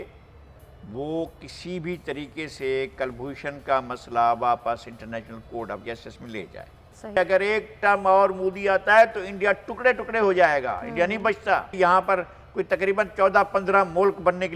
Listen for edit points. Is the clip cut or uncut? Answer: cut